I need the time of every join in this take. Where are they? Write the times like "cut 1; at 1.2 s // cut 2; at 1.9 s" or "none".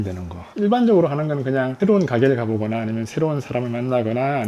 none